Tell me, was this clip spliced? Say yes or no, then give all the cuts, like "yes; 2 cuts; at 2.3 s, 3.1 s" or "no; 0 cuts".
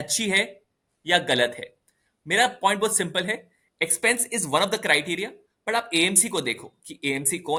no; 0 cuts